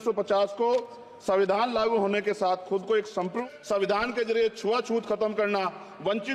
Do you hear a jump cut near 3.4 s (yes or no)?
yes